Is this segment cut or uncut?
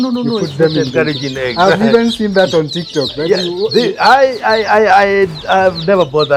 uncut